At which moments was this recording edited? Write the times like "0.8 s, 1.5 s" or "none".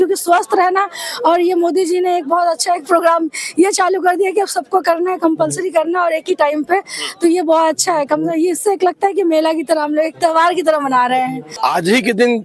11.4 s